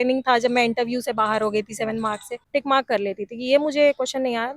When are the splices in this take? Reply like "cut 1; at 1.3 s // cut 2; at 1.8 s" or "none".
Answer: cut 1; at 2.4 s